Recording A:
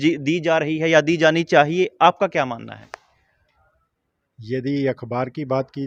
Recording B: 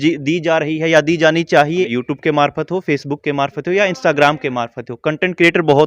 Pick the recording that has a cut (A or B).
B